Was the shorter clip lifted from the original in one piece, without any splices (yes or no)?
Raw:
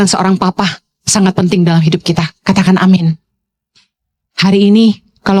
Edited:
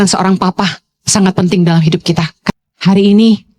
no